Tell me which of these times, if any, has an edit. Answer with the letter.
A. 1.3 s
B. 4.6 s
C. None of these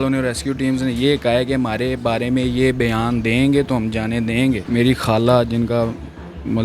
B